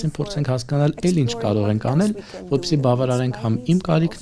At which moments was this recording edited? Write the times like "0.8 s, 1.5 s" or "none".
none